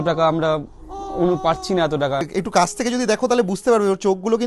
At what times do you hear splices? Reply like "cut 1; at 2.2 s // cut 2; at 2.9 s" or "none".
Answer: cut 1; at 2.2 s

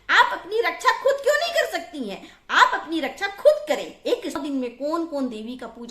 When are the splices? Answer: cut 1; at 4.4 s

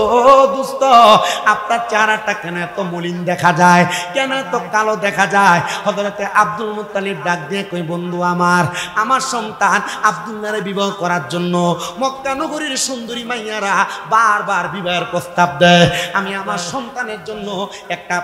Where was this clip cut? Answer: none

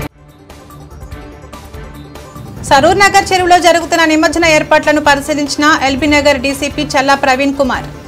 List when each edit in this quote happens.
none

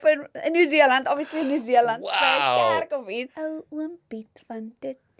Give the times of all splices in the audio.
cut 1; at 3.3 s

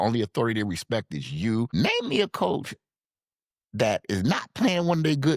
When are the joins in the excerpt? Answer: cut 1; at 1.7 s

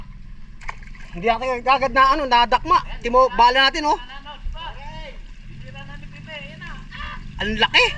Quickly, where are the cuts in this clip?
none

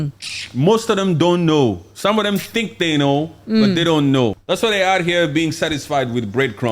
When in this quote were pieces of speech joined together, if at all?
cut 1; at 4.4 s

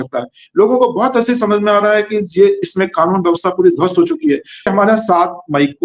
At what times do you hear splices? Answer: cut 1; at 4.7 s

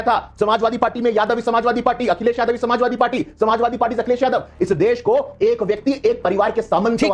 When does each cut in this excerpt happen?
none

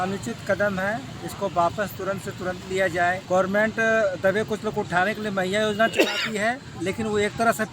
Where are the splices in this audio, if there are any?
cut 1; at 3.2 s // cut 2; at 6.7 s

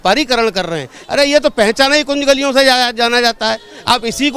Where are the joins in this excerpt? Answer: cut 1; at 0.9 s

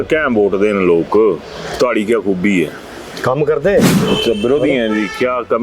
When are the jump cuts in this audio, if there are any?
cut 1; at 3.9 s

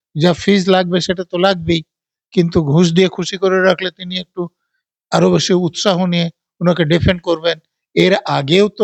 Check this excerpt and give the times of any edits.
none

